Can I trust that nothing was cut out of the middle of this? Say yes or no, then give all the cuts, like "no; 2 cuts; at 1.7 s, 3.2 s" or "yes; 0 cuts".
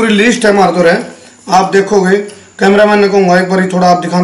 yes; 0 cuts